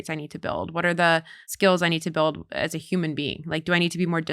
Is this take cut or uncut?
cut